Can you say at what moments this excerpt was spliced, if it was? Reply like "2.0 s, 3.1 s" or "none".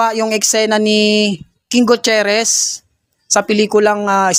none